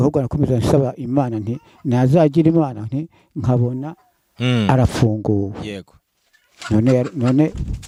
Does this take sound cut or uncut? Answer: uncut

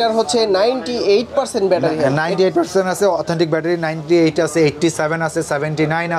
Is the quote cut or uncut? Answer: uncut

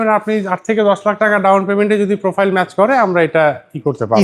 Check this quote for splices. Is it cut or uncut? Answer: uncut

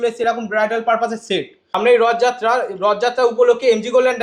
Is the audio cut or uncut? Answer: cut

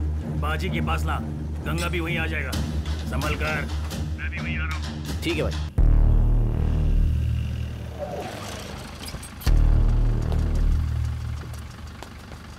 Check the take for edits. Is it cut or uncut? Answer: cut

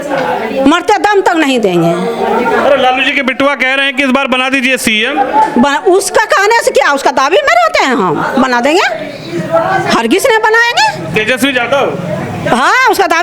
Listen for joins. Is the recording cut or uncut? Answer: uncut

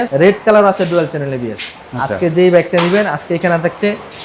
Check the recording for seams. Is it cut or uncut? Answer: uncut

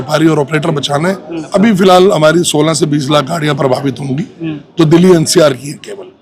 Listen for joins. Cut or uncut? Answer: cut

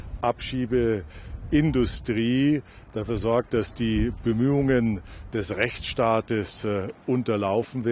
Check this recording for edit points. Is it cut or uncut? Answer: uncut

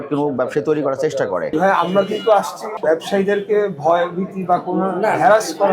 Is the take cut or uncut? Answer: cut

